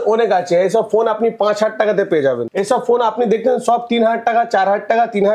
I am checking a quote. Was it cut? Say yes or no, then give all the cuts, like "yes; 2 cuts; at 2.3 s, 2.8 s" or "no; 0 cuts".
yes; 1 cut; at 2.5 s